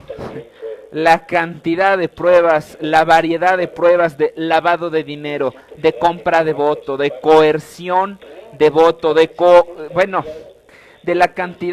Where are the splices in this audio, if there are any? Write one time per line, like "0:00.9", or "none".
0:08.8